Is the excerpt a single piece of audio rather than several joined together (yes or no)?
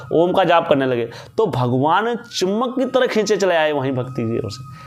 yes